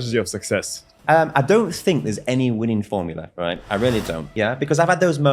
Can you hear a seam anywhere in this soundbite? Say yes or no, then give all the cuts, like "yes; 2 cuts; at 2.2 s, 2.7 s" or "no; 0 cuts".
yes; 2 cuts; at 1.0 s, 4.3 s